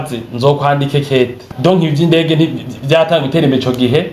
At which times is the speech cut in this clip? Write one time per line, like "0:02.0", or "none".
0:01.4